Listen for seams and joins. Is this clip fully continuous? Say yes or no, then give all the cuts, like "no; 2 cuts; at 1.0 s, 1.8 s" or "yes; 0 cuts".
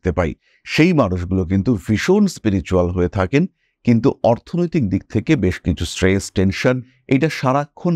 yes; 0 cuts